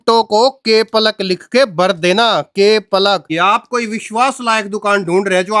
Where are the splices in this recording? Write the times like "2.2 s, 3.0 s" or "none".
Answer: 3.3 s